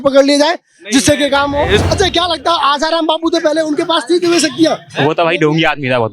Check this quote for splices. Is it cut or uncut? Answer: cut